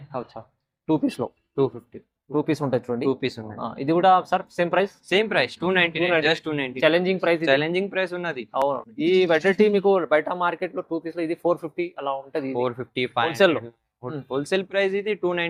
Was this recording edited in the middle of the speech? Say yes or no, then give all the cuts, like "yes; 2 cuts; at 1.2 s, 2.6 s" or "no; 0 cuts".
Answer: no; 0 cuts